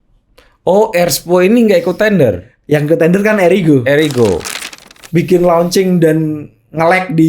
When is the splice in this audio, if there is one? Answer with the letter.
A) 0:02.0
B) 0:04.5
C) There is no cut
B